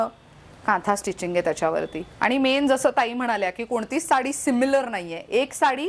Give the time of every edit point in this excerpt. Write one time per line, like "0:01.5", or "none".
none